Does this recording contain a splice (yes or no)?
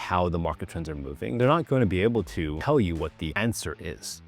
yes